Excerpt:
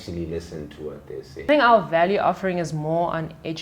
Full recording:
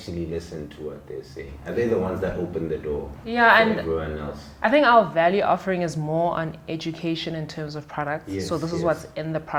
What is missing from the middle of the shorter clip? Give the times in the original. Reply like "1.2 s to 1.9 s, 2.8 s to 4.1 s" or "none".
1.5 s to 4.7 s

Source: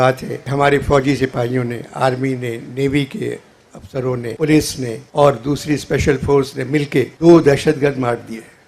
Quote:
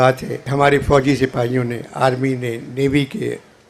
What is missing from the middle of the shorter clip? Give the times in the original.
none

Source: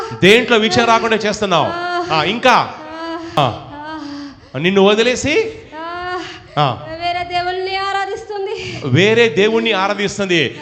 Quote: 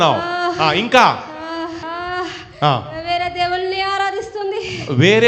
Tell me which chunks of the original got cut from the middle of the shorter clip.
3.3 s to 5.7 s

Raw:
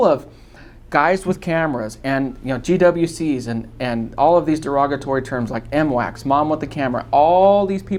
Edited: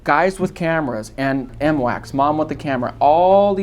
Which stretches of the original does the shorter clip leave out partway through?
2.4 s to 5.6 s

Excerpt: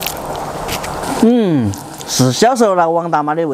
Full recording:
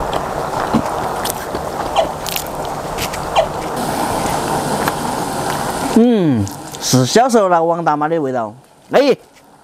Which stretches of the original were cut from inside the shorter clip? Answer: 3.3 s to 5.8 s

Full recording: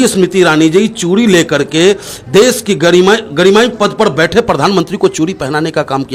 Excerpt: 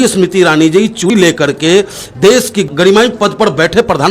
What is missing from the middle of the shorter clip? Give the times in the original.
1.1 s to 1.2 s, 2.8 s to 3.2 s

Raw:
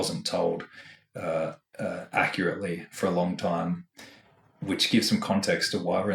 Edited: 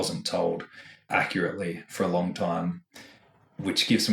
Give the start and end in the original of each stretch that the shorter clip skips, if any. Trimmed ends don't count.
1.0 s to 2.0 s

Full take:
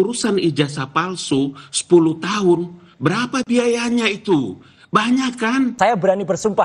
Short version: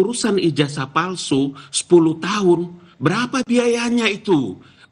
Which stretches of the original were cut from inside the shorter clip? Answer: none

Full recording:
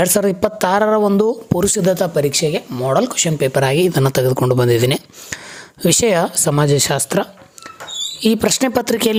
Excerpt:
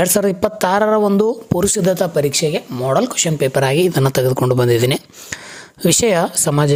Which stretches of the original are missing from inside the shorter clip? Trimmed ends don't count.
none

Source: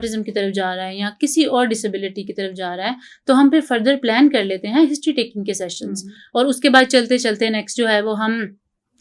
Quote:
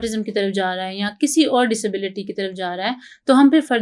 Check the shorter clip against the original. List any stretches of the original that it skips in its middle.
none

